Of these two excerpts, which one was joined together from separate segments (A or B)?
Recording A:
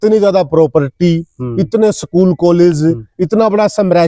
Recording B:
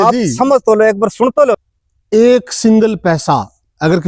B